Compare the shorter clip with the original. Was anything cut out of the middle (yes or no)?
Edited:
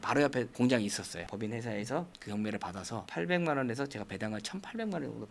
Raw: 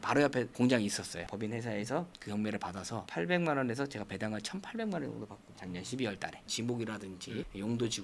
no